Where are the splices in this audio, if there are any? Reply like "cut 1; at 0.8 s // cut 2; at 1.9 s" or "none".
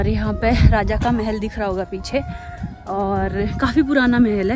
none